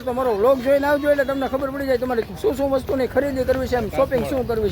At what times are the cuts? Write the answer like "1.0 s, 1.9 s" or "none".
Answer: none

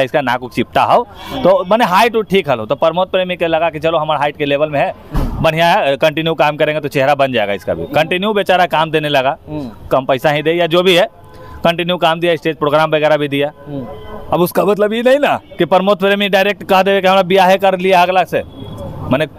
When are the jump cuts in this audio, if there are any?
none

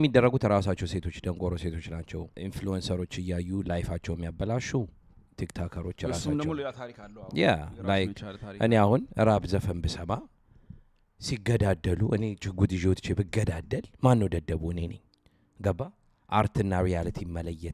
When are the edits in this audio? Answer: 2.3 s

